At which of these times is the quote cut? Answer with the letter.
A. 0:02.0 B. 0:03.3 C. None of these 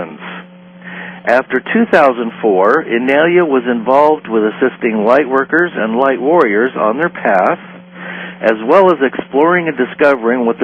A